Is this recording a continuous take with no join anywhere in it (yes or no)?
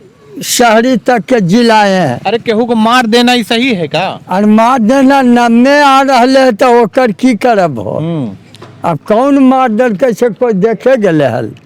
yes